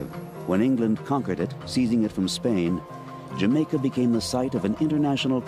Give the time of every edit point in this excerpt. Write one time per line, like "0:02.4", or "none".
none